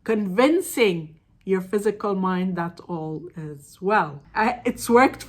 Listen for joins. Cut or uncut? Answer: cut